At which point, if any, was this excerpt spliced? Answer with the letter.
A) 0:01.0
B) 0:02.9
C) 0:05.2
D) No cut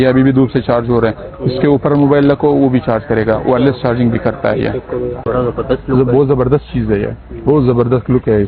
C